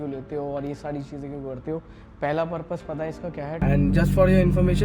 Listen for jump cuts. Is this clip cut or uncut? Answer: cut